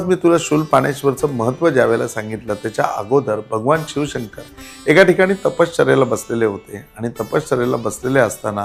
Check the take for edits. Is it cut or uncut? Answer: uncut